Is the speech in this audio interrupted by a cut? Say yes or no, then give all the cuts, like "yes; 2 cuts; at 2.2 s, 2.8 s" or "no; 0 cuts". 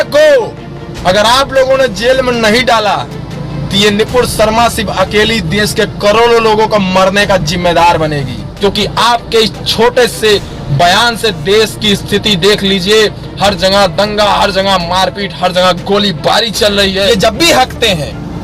yes; 2 cuts; at 8.4 s, 17.1 s